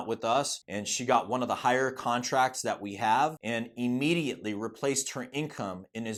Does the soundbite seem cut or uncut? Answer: uncut